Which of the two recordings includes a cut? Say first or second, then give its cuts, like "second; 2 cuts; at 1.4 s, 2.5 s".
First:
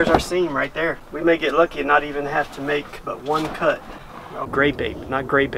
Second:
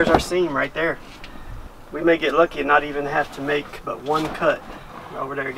first; 2 cuts; at 1.0 s, 4.4 s